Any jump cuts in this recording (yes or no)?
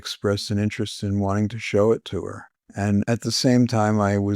yes